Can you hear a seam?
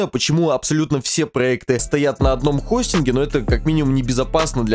no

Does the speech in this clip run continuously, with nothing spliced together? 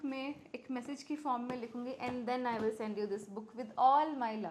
yes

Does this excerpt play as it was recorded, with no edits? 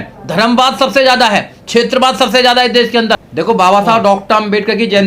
no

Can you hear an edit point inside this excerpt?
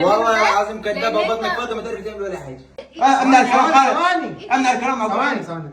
yes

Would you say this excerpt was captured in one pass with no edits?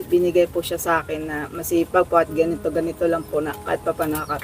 yes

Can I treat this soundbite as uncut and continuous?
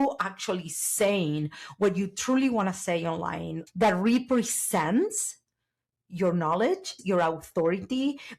no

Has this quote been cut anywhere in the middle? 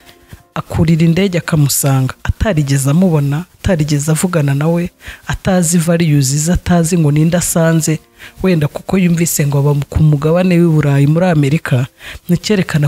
no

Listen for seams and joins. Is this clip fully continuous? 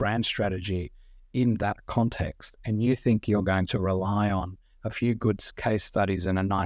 yes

